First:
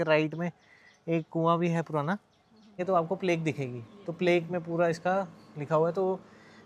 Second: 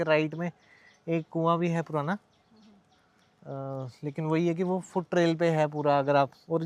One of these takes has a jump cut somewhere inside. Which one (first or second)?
first